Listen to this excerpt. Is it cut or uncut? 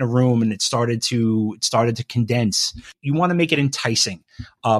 cut